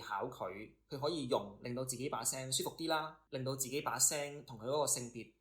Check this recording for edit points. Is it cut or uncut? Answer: cut